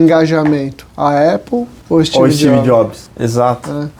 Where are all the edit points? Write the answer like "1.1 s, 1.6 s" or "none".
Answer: 1.7 s, 3.0 s